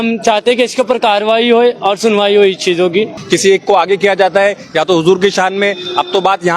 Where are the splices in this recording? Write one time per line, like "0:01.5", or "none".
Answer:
0:03.2